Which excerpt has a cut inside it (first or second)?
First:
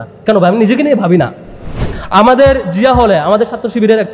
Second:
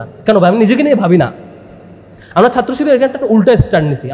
first